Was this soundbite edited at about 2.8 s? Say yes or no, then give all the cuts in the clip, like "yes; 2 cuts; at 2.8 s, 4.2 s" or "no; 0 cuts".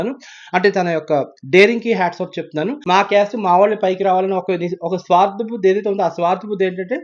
yes; 1 cut; at 2.8 s